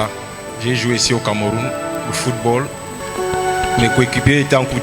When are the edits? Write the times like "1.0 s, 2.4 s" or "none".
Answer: 3.0 s